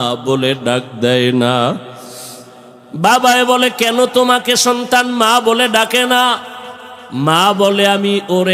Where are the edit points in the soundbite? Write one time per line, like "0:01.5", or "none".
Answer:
none